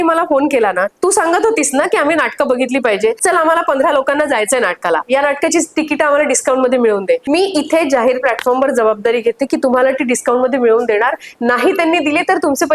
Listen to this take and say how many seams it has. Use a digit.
3